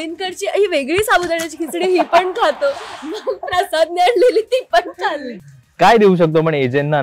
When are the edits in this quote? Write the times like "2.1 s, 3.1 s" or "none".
5.3 s